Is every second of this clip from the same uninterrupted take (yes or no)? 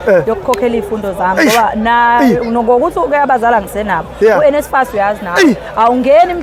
yes